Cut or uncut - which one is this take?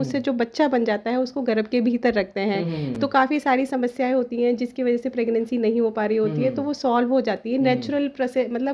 uncut